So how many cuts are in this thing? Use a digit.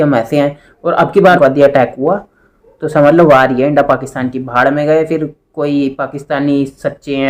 1